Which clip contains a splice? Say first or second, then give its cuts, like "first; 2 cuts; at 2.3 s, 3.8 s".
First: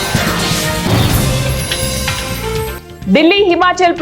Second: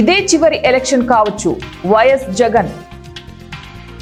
first; 1 cut; at 2.8 s